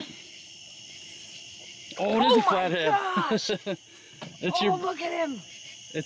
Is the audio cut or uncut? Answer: uncut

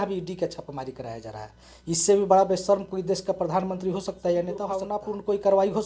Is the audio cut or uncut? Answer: cut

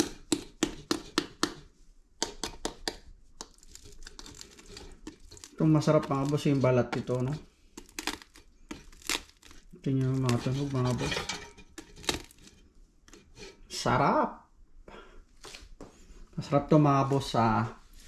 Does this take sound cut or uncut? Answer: uncut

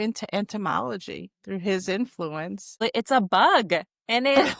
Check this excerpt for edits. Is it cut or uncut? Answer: cut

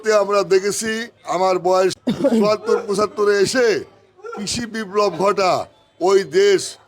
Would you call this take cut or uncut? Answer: cut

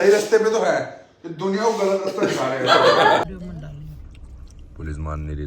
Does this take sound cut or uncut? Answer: cut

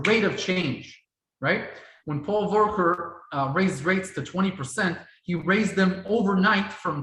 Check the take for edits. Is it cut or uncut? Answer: uncut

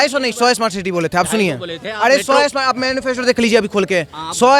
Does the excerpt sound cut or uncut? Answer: uncut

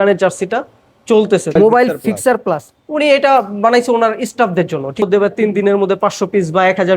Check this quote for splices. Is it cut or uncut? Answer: cut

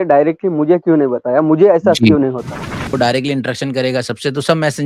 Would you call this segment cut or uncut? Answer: cut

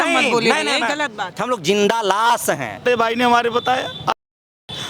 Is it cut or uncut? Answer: cut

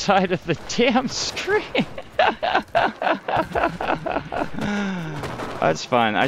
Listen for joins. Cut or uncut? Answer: uncut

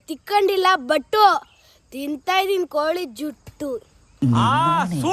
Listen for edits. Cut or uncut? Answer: cut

